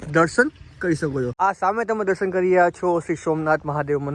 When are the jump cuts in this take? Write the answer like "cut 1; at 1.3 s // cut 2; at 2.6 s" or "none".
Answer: cut 1; at 1.3 s

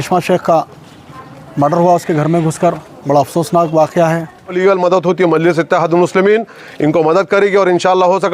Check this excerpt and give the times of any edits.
cut 1; at 4.6 s

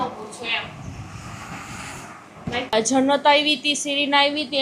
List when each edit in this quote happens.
cut 1; at 2.7 s

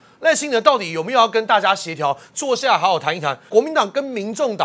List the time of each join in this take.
cut 1; at 3.5 s

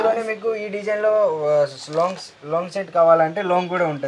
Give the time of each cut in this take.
none

